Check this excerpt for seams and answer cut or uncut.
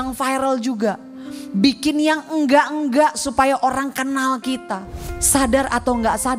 cut